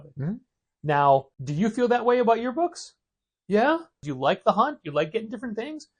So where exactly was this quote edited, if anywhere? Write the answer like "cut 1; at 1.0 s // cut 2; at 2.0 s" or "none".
cut 1; at 1.4 s // cut 2; at 4.0 s